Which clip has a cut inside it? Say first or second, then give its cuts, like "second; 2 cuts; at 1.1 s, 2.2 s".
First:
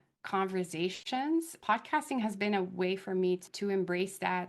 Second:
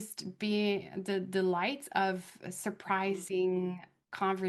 first; 2 cuts; at 1.6 s, 3.5 s